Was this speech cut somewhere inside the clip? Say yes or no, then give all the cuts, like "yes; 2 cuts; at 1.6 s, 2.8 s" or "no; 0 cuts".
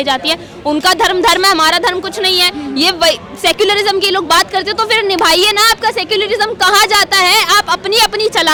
no; 0 cuts